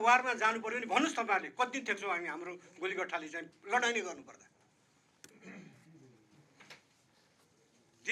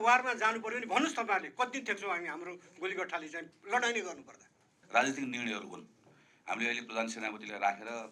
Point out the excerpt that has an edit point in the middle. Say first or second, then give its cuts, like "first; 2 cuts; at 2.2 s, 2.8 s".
second; 1 cut; at 4.7 s